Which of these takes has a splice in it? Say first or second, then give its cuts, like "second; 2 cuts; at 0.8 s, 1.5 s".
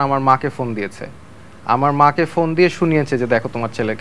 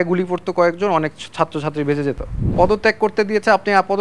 second; 1 cut; at 2.4 s